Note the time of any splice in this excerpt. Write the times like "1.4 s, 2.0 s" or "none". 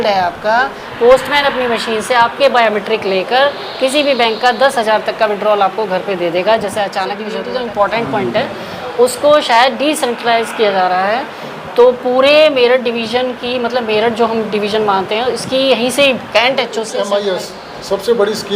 7.3 s, 16.9 s